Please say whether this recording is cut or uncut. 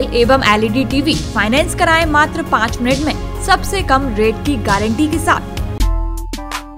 cut